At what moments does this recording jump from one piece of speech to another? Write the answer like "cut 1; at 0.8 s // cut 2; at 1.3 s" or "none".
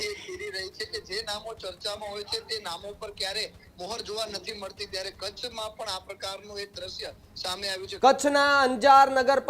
cut 1; at 7.8 s